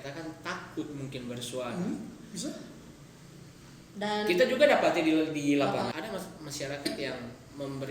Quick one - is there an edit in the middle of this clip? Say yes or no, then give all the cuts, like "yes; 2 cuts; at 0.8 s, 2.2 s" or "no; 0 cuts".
yes; 1 cut; at 5.9 s